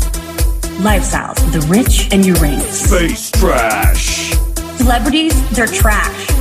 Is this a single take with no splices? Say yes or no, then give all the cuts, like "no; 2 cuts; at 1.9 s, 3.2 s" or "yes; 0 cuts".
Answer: yes; 0 cuts